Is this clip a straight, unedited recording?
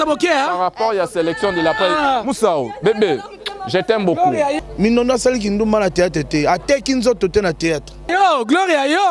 no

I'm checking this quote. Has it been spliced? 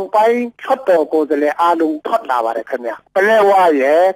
yes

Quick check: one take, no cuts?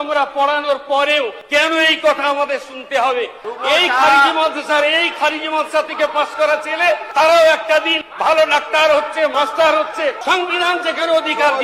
no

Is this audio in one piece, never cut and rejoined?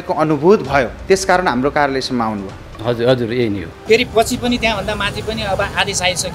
no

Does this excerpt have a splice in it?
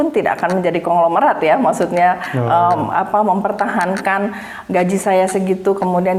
no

